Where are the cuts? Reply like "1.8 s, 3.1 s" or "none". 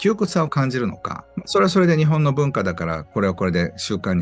1.5 s